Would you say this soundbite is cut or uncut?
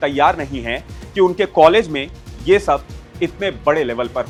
uncut